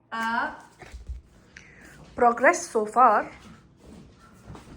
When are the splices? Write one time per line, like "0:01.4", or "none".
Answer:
0:01.6